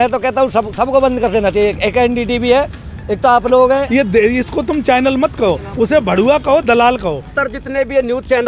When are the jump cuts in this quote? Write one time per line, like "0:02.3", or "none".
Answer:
0:03.9
0:07.3